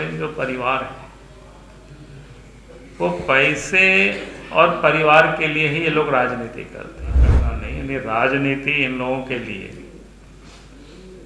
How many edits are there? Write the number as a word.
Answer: one